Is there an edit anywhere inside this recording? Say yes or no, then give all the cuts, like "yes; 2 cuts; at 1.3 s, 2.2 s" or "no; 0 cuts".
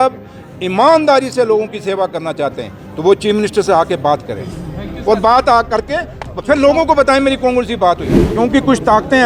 yes; 1 cut; at 8.2 s